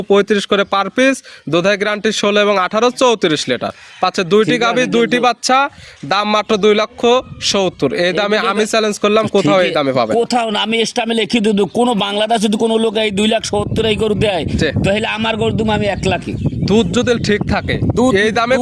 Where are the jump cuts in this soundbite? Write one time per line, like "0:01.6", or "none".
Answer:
none